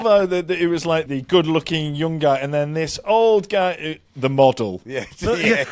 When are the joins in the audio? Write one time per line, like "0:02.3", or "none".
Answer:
0:01.1

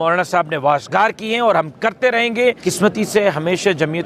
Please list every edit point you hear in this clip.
0:02.6

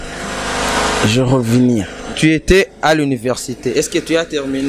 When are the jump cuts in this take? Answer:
0:02.1

